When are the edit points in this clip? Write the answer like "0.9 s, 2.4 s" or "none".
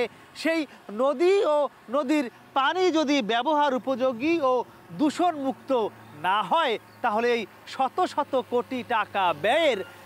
none